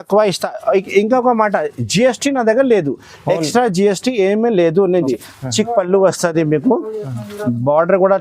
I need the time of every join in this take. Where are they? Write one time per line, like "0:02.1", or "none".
0:05.0